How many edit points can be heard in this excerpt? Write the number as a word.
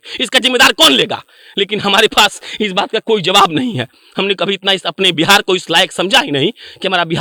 zero